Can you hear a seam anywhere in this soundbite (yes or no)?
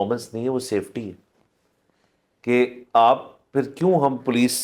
no